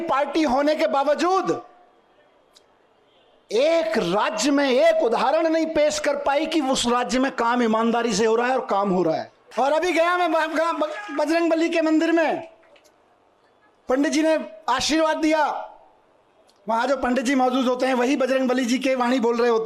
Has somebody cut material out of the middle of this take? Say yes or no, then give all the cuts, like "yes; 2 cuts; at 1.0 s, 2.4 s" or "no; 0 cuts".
yes; 1 cut; at 9.4 s